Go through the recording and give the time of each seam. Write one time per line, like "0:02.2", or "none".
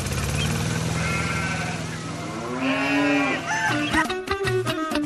none